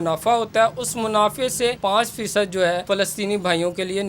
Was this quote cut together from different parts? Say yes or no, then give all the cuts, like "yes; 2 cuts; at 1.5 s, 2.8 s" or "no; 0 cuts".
yes; 2 cuts; at 1.8 s, 2.8 s